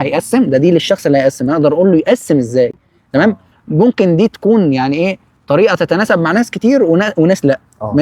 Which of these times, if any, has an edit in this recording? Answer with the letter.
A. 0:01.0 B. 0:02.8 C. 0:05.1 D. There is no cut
D